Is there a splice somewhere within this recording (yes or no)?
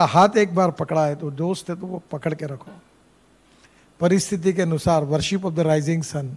no